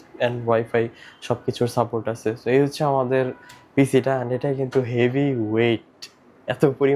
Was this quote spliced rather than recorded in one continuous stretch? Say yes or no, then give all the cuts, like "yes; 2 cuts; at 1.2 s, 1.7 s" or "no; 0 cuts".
no; 0 cuts